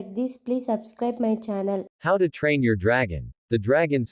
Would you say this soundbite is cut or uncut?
cut